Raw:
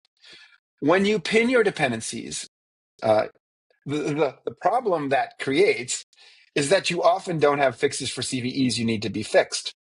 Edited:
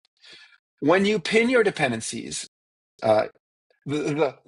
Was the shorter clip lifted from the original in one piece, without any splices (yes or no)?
yes